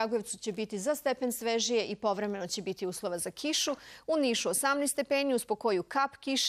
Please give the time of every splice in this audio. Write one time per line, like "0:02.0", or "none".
0:04.5